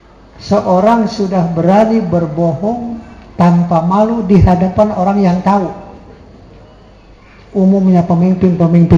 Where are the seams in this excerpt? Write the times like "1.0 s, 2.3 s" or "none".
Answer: none